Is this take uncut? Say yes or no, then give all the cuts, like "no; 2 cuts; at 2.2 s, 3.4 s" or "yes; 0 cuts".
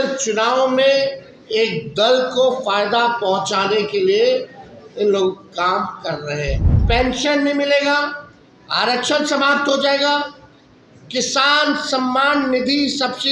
no; 1 cut; at 6.7 s